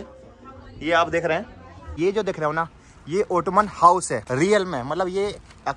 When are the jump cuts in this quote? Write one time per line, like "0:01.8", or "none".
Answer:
0:01.9
0:04.2

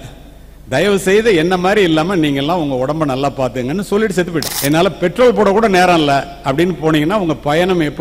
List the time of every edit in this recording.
0:04.5

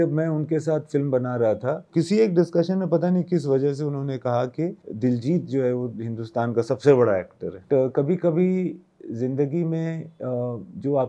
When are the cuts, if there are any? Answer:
0:01.9
0:07.6

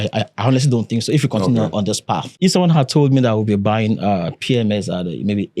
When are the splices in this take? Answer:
0:02.3

